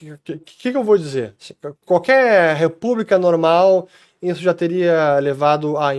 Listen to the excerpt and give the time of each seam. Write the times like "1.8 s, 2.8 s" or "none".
none